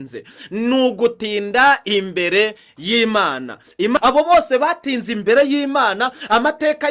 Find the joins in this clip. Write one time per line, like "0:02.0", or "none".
0:04.0